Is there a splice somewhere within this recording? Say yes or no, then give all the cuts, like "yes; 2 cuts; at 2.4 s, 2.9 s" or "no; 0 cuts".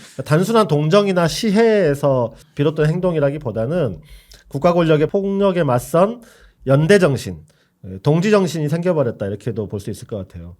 yes; 2 cuts; at 2.4 s, 5.1 s